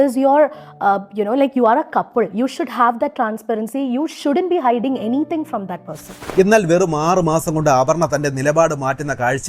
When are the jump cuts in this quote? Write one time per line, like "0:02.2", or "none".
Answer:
0:06.3